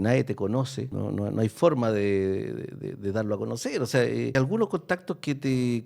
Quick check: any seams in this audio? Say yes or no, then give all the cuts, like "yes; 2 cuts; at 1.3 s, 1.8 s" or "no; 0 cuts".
yes; 2 cuts; at 0.9 s, 4.3 s